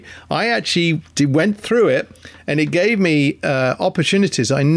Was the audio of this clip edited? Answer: no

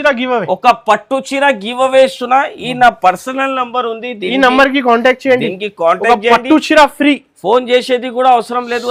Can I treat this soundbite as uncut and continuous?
yes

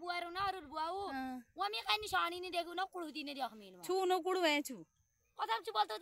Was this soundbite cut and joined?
no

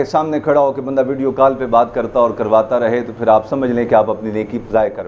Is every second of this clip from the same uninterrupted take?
yes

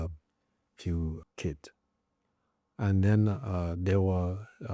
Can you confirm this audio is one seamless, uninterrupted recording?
no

